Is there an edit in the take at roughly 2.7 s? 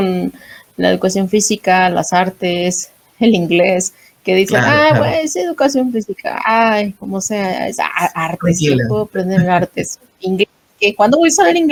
no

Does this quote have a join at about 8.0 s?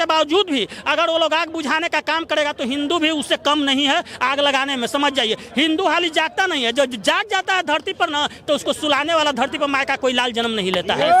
no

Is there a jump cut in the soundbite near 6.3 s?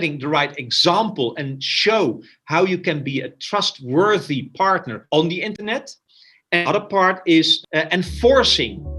no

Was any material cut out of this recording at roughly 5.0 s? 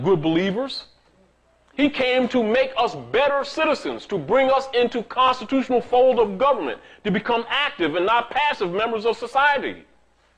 yes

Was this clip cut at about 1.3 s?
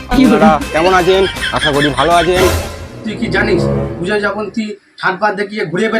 no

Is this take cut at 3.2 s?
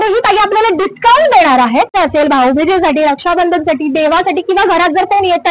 no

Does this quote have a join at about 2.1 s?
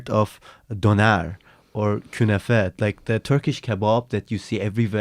no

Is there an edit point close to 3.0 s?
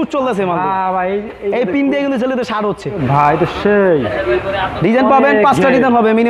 yes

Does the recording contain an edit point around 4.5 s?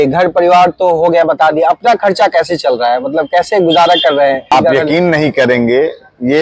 yes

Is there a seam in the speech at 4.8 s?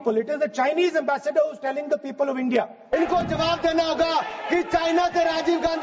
no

